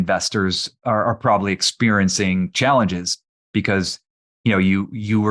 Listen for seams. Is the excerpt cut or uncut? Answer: uncut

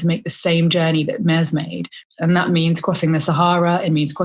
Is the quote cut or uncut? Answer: cut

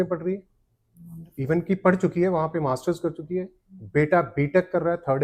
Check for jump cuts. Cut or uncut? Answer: uncut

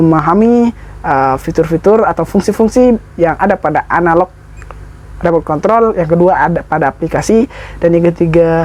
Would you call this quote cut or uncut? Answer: uncut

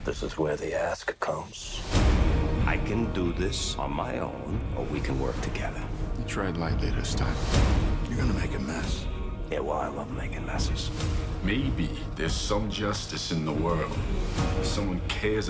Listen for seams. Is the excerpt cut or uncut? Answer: uncut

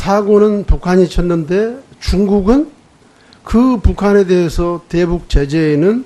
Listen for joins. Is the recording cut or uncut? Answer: uncut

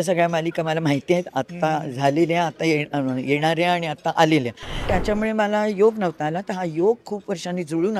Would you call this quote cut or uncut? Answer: cut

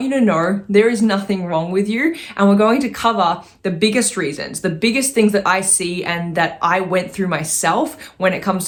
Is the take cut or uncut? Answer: uncut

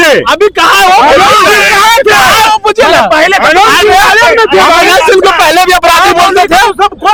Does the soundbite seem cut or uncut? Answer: uncut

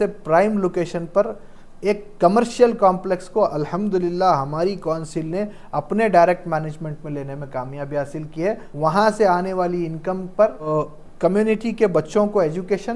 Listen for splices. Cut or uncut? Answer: cut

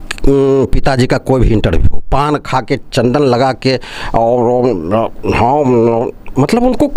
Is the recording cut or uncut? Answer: uncut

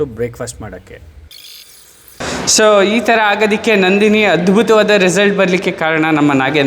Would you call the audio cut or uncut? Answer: cut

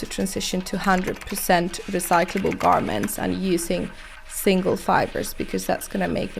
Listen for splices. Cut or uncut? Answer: uncut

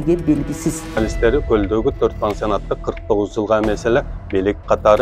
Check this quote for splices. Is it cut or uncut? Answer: cut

